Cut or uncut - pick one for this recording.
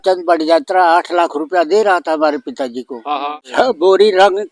cut